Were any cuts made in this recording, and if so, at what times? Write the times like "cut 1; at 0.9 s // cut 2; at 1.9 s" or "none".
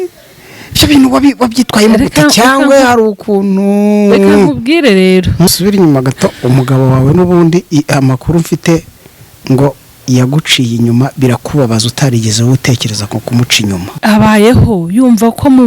cut 1; at 5.5 s // cut 2; at 13.9 s